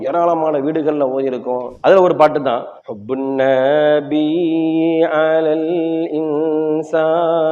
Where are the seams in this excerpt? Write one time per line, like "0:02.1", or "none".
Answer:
0:01.7